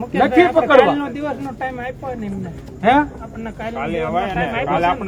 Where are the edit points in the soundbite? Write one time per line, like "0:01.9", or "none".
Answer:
none